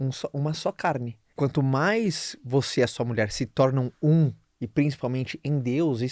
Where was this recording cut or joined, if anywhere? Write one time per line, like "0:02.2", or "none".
0:01.2